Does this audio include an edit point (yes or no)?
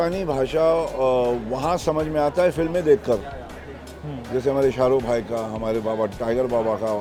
no